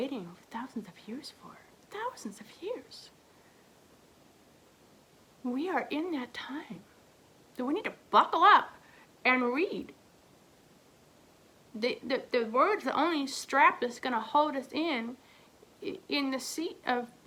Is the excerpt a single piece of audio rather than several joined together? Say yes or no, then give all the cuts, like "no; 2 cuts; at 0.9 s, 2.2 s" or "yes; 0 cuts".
yes; 0 cuts